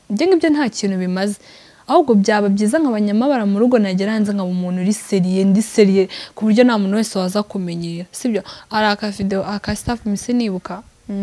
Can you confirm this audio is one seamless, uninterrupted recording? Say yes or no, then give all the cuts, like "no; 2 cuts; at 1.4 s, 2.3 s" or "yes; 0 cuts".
yes; 0 cuts